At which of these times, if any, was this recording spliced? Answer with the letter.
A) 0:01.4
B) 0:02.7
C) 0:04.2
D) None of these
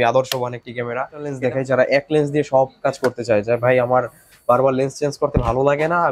A